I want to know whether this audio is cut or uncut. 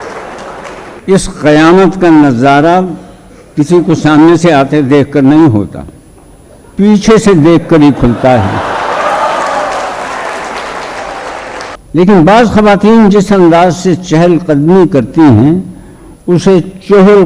cut